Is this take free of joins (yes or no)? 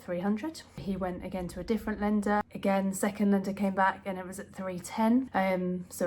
no